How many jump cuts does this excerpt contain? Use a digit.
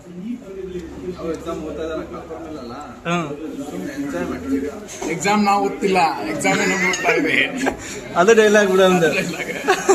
0